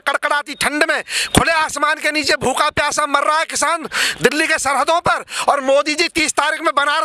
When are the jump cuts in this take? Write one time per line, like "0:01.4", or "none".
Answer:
none

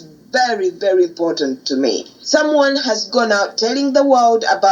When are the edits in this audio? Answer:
0:02.1

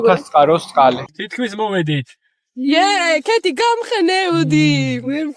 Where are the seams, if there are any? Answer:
0:01.2

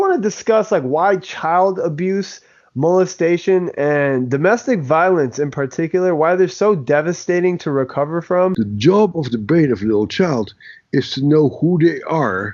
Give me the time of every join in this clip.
0:08.5

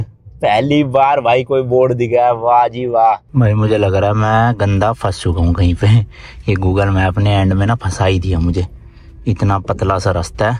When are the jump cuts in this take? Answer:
0:03.3

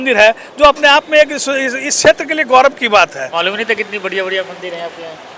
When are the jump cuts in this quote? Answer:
0:03.3

